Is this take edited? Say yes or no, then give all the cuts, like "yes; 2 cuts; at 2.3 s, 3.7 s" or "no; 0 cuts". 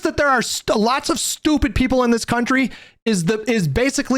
no; 0 cuts